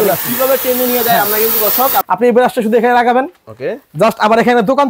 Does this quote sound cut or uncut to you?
cut